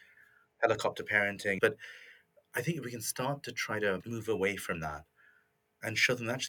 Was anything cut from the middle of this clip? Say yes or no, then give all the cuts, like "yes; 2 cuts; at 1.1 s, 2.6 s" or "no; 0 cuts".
yes; 2 cuts; at 1.5 s, 4.0 s